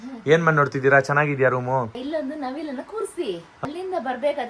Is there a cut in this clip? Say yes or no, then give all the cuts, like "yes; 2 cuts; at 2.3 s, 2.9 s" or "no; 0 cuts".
yes; 2 cuts; at 2.0 s, 3.5 s